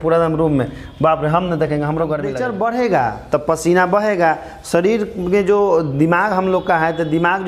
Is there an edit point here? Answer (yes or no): yes